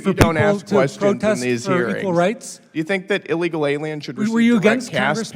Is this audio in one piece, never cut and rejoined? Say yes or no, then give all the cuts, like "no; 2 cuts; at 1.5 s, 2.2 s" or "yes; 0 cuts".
yes; 0 cuts